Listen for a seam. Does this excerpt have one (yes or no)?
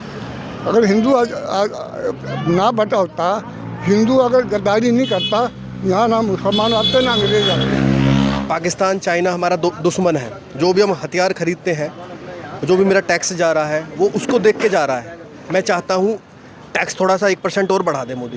yes